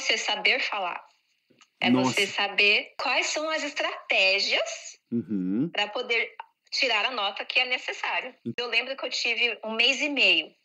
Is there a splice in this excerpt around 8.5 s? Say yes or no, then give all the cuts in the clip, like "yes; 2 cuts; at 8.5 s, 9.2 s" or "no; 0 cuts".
yes; 2 cuts; at 3.0 s, 8.5 s